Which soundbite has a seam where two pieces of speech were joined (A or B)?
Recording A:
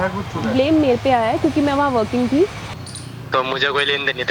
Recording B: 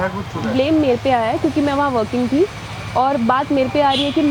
A